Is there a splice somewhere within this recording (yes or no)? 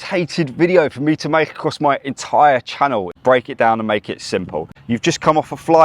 yes